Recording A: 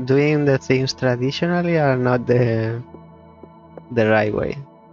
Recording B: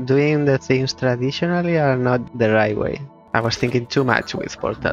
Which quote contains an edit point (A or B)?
B